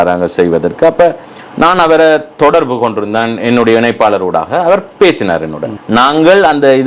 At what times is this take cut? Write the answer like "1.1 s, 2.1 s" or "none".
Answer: 1.3 s, 5.7 s